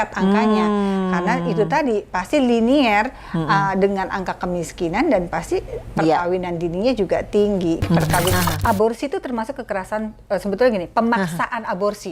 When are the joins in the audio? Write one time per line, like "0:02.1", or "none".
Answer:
0:08.3